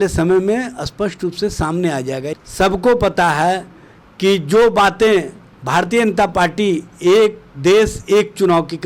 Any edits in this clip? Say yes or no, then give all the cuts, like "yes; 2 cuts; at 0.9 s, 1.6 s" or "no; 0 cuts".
yes; 1 cut; at 2.3 s